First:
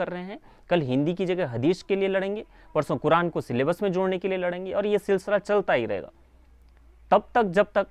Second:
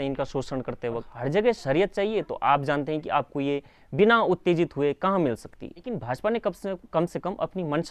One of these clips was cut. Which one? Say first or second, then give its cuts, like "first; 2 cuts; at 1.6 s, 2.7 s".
second; 2 cuts; at 1.1 s, 6.0 s